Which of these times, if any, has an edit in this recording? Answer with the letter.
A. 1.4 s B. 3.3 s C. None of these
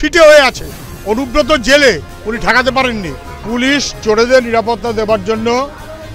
B